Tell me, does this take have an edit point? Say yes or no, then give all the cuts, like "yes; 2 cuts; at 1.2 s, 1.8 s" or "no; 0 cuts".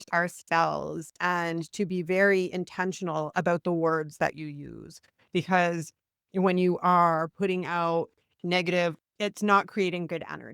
yes; 1 cut; at 9.0 s